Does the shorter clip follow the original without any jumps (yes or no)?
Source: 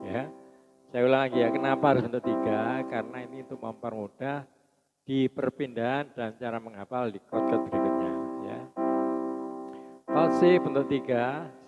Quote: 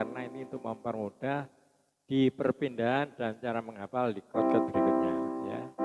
yes